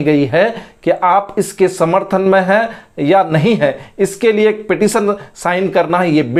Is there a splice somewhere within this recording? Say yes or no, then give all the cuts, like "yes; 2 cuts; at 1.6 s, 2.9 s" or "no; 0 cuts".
no; 0 cuts